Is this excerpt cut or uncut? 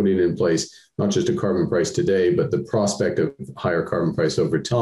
uncut